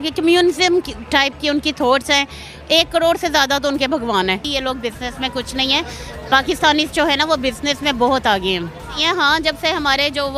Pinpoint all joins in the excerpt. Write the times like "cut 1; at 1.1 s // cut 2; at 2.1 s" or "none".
cut 1; at 4.4 s // cut 2; at 9.0 s